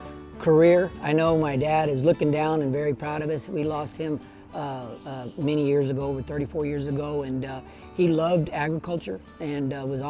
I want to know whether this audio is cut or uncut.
cut